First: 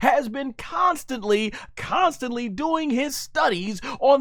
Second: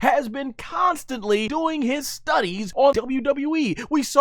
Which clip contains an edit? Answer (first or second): second